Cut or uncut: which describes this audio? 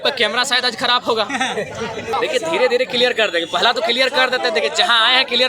cut